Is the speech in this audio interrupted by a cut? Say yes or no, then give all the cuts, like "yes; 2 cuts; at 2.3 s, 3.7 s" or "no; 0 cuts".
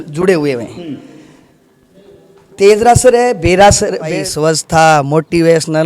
yes; 1 cut; at 4.2 s